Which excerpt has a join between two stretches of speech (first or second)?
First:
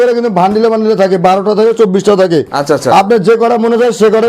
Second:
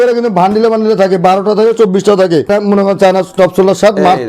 second